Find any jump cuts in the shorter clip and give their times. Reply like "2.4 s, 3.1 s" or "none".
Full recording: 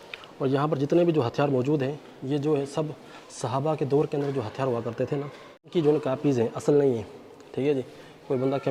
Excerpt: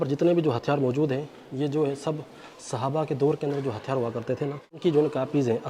4.6 s